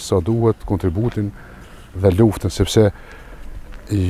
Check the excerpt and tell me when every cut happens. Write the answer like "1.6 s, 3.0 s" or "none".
none